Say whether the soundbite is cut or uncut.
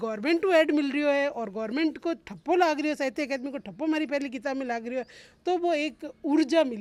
uncut